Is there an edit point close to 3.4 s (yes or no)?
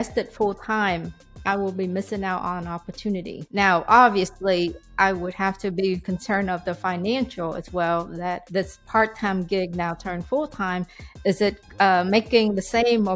yes